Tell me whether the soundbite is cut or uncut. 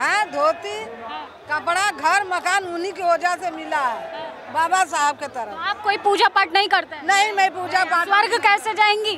uncut